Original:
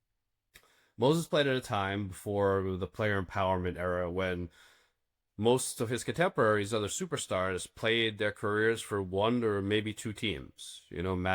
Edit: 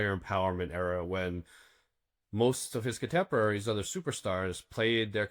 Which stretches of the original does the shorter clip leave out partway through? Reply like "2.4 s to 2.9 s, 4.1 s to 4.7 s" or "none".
none